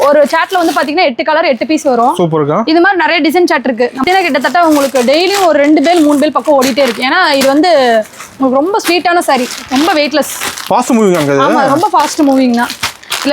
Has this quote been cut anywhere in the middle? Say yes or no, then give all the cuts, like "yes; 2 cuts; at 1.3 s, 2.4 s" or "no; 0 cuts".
yes; 1 cut; at 4.0 s